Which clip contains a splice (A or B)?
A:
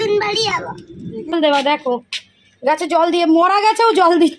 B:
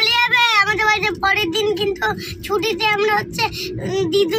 A